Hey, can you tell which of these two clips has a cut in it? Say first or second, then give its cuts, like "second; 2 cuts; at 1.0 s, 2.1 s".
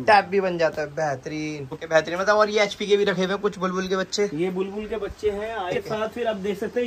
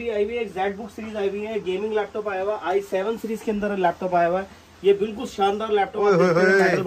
first; 2 cuts; at 1.7 s, 5.8 s